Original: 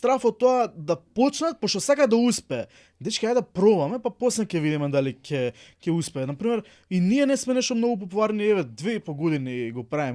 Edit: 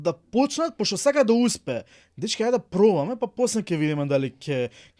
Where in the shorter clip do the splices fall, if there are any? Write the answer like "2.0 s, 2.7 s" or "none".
none